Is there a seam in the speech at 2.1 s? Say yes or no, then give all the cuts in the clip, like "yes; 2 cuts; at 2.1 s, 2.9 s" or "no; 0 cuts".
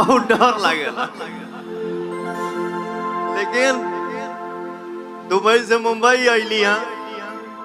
no; 0 cuts